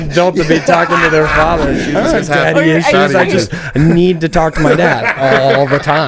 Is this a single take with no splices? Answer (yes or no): no